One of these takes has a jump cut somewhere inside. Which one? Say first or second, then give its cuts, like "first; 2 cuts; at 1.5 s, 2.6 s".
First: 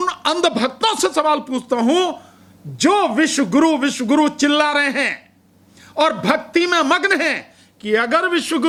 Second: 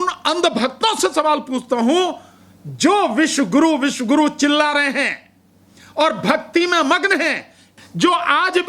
second; 1 cut; at 7.7 s